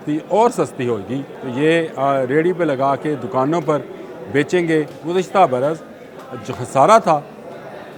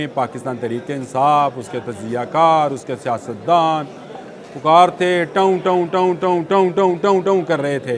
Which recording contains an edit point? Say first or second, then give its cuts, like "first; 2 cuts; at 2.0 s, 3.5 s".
first; 2 cuts; at 1.4 s, 5.0 s